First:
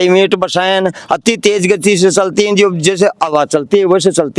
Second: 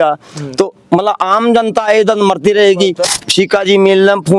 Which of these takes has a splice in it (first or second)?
second